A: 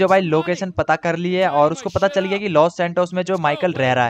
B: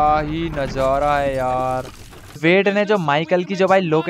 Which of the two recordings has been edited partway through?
B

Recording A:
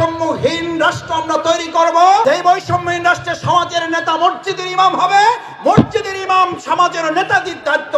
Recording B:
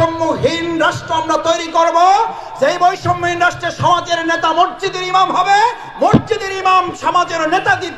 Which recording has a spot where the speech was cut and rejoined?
A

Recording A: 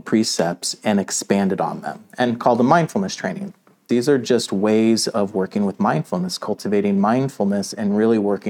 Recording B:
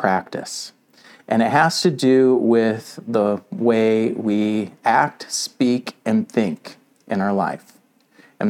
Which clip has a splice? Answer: A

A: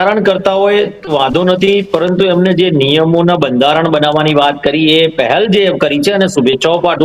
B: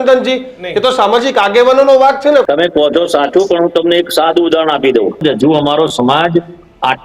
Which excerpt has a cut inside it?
B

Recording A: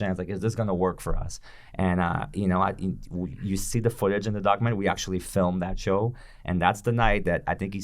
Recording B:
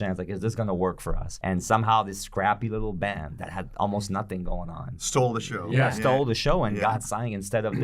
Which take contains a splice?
B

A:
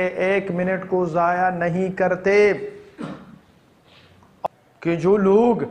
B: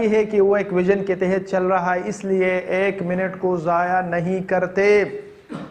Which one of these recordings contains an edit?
A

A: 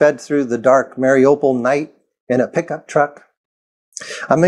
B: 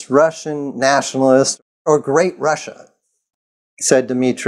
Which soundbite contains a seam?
B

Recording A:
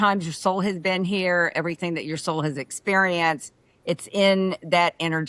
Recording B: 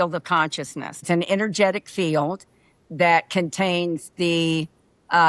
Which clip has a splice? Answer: B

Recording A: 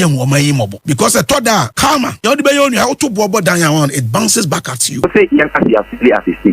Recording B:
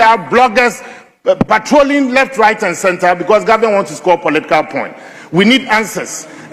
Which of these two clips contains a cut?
A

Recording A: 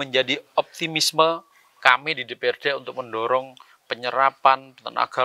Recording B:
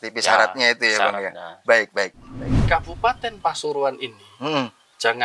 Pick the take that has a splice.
B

